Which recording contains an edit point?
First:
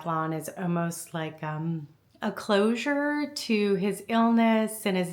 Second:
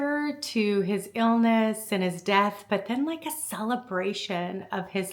first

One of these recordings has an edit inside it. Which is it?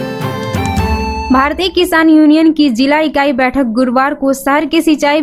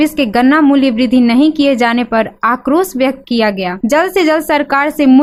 first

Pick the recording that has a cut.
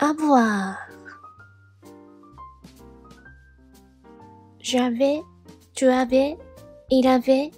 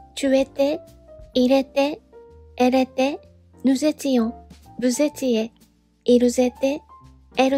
first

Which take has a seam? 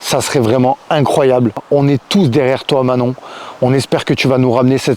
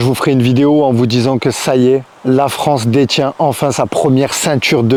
first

